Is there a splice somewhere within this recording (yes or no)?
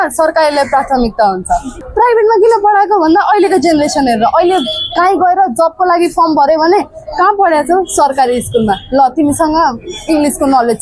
yes